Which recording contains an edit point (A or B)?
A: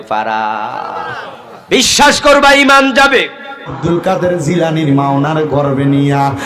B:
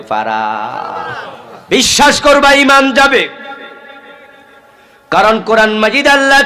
A